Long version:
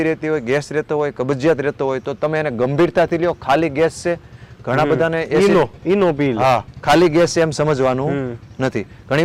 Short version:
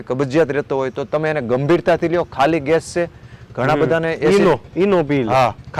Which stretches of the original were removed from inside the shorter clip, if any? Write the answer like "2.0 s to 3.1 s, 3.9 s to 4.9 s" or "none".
none